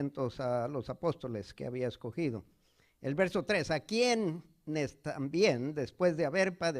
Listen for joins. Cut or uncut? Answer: uncut